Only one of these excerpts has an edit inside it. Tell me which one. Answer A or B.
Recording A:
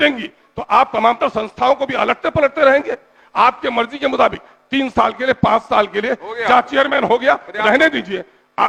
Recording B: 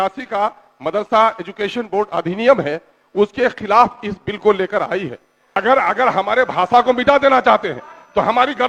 B